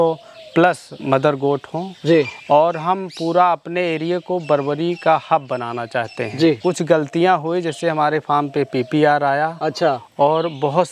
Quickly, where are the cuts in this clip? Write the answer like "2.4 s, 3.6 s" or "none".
0.9 s, 6.6 s